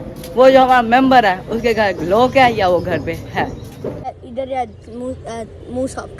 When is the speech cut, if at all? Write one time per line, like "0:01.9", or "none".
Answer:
0:04.1